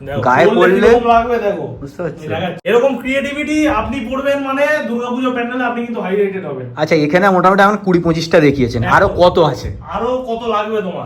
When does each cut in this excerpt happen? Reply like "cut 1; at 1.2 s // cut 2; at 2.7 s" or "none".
cut 1; at 2.6 s